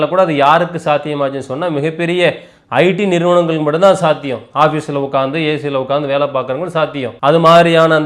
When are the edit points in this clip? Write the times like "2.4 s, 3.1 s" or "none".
7.1 s